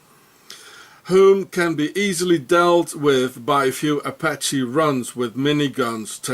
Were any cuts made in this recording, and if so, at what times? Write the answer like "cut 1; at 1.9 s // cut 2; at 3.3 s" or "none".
cut 1; at 3.6 s